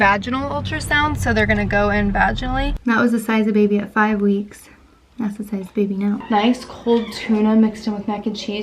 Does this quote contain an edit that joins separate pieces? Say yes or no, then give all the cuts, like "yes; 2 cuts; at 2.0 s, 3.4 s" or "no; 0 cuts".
yes; 2 cuts; at 2.7 s, 6.2 s